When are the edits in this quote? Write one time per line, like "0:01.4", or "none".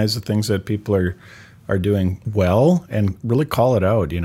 0:02.2